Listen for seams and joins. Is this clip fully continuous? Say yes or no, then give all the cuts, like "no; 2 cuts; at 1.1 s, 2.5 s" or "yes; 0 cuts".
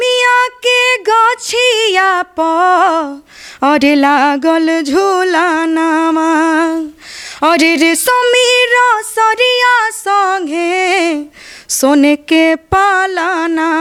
yes; 0 cuts